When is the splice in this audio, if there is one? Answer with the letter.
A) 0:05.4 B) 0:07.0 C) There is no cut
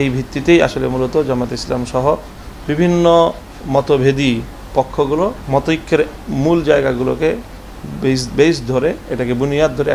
A